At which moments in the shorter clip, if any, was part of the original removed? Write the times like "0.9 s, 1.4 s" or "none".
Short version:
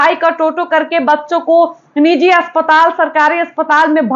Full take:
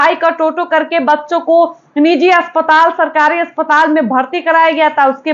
none